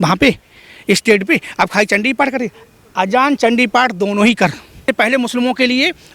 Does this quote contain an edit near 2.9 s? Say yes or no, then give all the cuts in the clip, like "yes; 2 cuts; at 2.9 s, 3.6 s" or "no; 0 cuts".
no; 1 cut; at 4.8 s